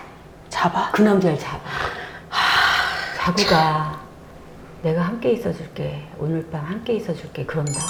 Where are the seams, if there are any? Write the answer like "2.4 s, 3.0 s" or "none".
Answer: none